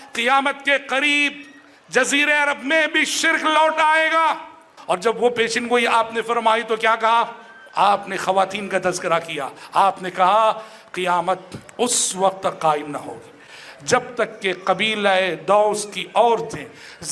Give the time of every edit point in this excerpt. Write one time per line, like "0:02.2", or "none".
0:04.7